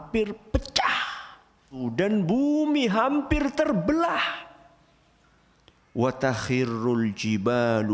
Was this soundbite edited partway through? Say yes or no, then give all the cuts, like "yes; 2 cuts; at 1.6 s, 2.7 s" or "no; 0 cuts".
yes; 1 cut; at 1.8 s